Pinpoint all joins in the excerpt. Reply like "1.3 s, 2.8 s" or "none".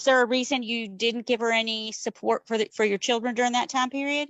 none